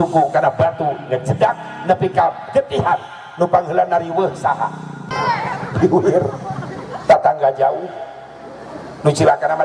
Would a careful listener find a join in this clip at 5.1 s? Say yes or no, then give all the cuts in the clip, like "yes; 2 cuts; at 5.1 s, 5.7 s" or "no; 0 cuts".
yes; 1 cut; at 5.1 s